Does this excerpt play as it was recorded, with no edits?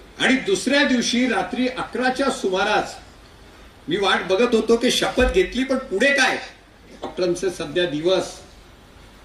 no; 1 cut; at 7.0 s

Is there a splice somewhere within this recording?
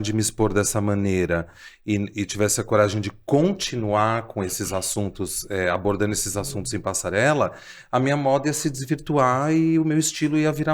no; 0 cuts

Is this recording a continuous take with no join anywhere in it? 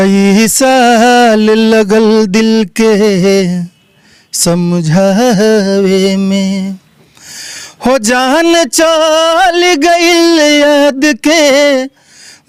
yes; 0 cuts

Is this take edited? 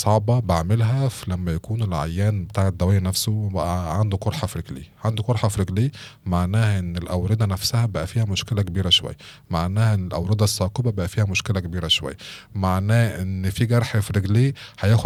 no; 0 cuts

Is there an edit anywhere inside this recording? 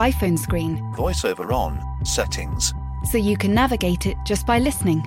no; 0 cuts

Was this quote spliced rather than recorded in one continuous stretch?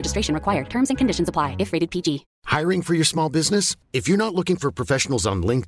yes; 1 cut; at 2.3 s

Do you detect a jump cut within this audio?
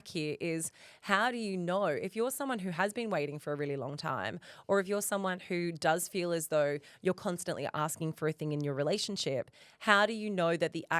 no; 0 cuts

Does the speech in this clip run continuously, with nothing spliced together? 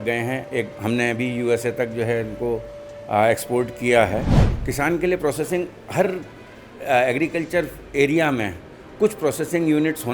no; 1 cut; at 4.4 s

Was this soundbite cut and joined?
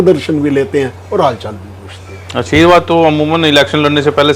no; 0 cuts

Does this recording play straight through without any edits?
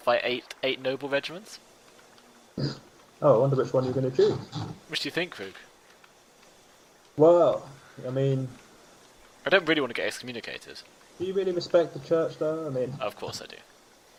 yes; 0 cuts

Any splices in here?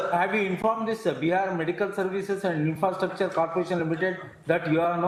no; 0 cuts

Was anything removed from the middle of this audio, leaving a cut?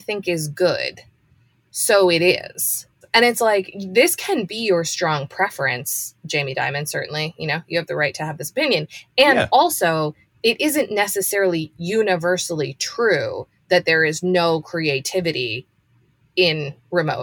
yes; 1 cut; at 2.8 s

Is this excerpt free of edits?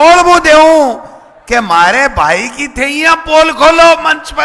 yes; 0 cuts

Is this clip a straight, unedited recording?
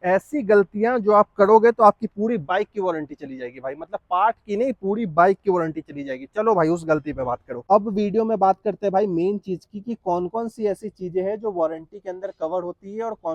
no; 1 cut; at 7.6 s

